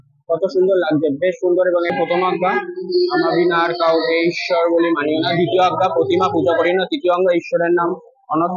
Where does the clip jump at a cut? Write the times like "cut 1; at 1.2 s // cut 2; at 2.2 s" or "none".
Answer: cut 1; at 1.9 s